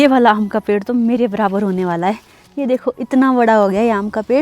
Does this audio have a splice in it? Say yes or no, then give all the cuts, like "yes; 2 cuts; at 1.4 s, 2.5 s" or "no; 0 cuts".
no; 0 cuts